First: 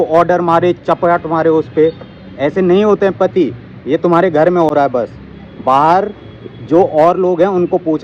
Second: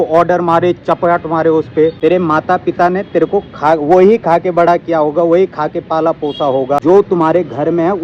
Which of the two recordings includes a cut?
second; 2 cuts; at 2.0 s, 6.8 s

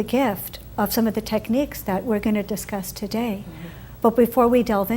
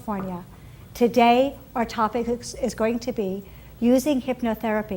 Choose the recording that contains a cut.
first; 1 cut; at 1.3 s

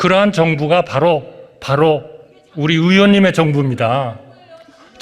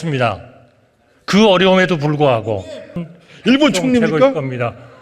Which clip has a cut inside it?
second; 1 cut; at 3.0 s

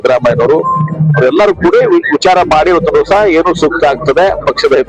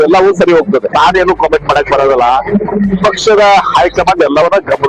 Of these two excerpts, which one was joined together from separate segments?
second; 1 cut; at 0.9 s

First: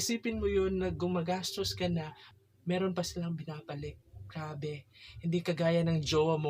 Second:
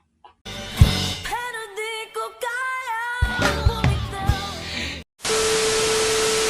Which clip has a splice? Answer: second; 1 cut; at 5.0 s

